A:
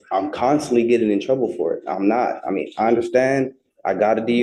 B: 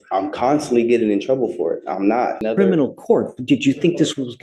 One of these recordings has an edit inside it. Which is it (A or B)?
B